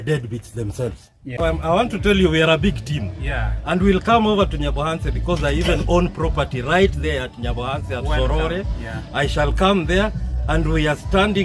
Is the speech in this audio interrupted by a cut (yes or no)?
yes